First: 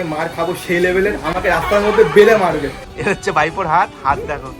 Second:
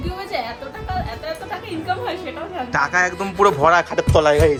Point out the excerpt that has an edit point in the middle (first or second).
first